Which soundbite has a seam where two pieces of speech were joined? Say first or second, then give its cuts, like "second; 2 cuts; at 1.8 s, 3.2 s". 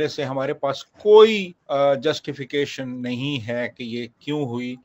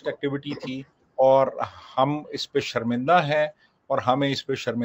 first; 1 cut; at 1.5 s